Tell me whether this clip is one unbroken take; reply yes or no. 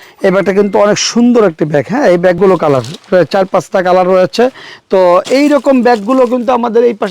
no